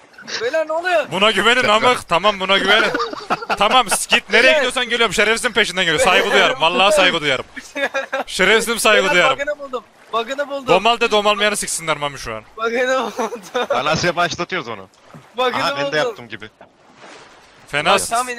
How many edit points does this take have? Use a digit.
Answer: 0